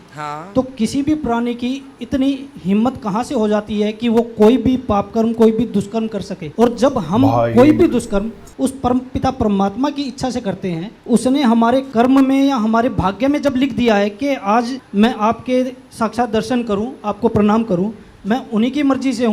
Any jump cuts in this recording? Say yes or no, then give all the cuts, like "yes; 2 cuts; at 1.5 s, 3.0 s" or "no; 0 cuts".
no; 0 cuts